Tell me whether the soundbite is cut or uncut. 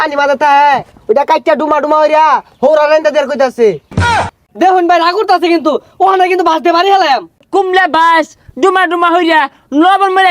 cut